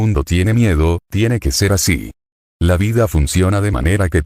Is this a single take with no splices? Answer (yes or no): no